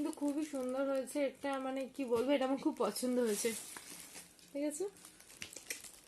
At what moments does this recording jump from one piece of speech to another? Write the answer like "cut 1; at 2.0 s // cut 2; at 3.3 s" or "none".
none